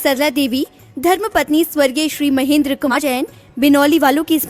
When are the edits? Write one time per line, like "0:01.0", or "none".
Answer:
0:02.9